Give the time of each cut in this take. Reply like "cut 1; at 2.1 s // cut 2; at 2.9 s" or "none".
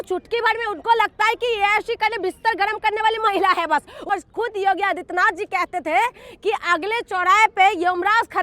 cut 1; at 4.1 s